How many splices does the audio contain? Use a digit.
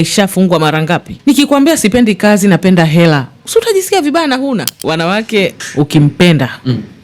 3